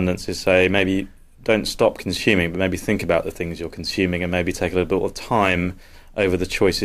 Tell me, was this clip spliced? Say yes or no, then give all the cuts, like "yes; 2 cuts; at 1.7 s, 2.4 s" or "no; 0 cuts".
no; 0 cuts